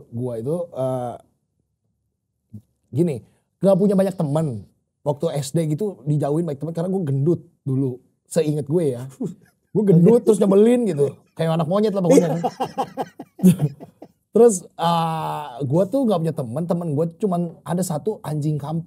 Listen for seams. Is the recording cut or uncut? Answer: uncut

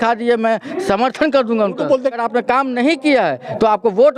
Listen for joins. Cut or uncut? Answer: cut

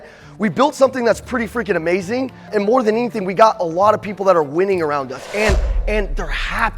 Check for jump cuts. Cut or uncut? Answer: cut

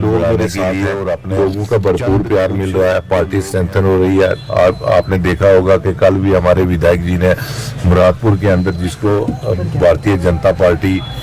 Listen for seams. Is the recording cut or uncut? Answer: cut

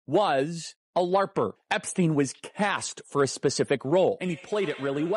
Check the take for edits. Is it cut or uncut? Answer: cut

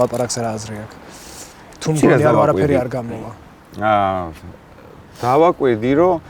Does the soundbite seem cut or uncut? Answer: uncut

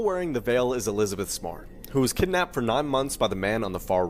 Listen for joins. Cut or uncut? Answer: uncut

